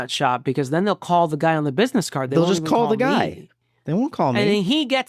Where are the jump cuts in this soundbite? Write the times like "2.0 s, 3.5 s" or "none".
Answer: none